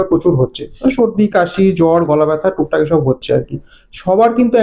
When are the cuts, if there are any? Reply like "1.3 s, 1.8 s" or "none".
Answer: none